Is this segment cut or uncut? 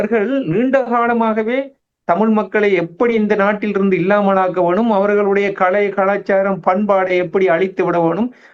uncut